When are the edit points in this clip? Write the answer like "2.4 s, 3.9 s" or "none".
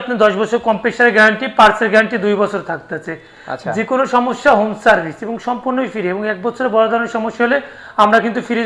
none